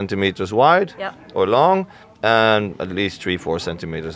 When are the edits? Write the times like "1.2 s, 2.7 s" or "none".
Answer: none